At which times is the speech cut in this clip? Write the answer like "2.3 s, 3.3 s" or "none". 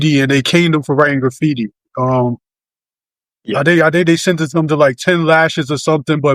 none

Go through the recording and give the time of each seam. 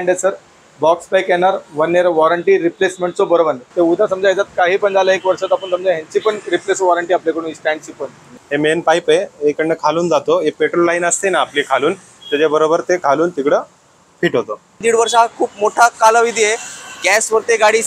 3.6 s, 8.4 s, 14.8 s

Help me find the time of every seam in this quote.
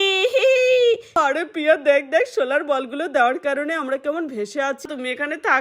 1.1 s, 4.8 s

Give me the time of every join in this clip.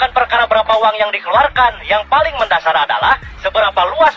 none

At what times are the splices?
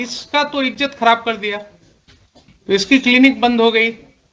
2.5 s

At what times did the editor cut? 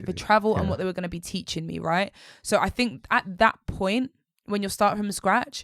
none

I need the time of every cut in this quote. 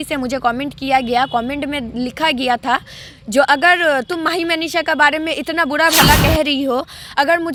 none

